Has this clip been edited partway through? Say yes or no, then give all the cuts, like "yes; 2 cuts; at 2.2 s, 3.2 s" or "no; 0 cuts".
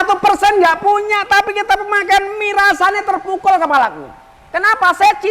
no; 0 cuts